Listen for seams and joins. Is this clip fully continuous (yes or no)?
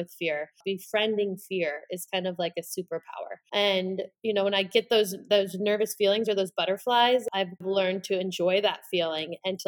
no